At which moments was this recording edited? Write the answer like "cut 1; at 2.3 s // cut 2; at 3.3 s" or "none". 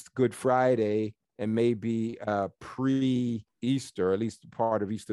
cut 1; at 1.2 s // cut 2; at 3.5 s